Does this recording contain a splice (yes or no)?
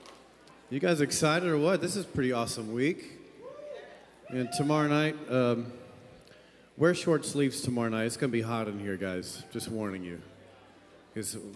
no